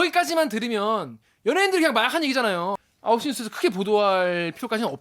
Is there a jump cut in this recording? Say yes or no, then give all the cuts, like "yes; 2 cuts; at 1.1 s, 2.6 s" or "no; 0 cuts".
yes; 1 cut; at 2.9 s